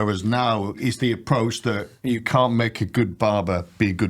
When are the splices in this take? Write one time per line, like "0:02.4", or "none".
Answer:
0:00.8
0:01.9
0:03.1